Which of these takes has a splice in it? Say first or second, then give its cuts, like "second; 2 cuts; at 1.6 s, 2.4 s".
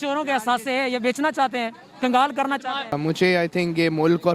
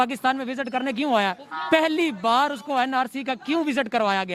first; 1 cut; at 3.0 s